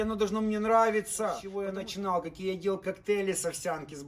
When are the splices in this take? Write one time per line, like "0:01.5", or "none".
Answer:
0:01.5